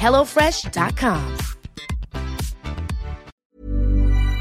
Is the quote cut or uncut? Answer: cut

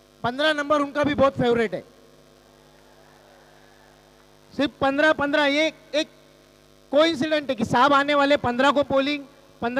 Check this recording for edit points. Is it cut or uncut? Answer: uncut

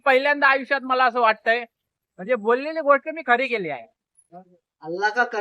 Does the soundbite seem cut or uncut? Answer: cut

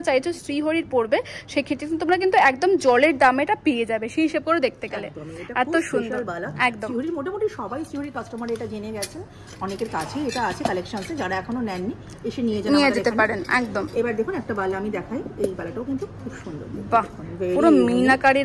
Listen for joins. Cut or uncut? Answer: uncut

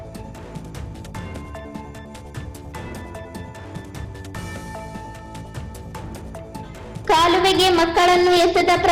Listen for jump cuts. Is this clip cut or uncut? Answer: uncut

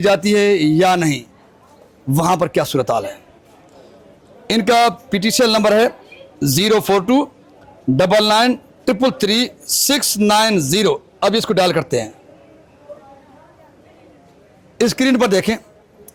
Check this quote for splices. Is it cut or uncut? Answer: uncut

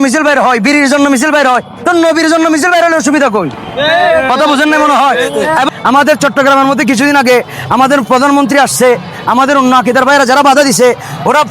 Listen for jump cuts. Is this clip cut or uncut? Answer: cut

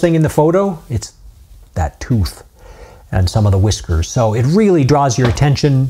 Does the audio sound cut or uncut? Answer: uncut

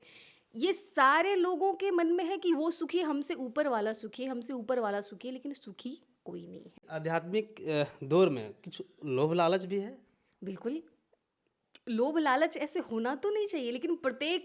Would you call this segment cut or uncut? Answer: cut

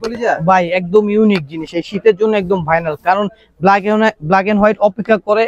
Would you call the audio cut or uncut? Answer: uncut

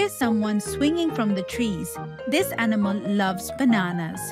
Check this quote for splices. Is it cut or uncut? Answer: uncut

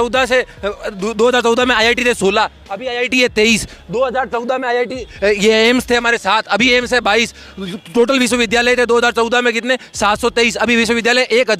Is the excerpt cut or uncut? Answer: uncut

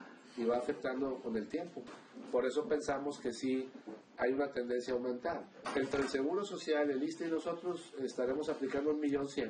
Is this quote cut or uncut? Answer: cut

